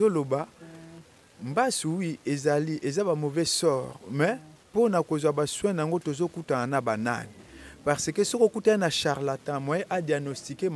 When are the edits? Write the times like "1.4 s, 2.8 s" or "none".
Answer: none